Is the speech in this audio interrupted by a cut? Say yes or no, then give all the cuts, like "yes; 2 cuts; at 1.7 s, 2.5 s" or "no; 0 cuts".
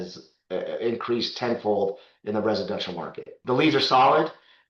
yes; 1 cut; at 3.3 s